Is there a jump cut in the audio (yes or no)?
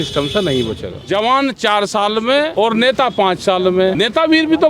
yes